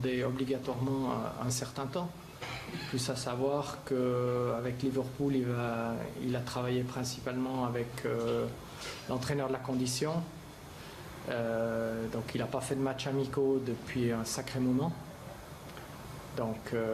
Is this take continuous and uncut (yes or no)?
no